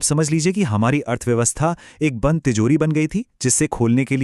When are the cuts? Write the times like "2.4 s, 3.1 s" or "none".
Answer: none